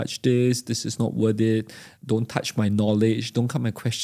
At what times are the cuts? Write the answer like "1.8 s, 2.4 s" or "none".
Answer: none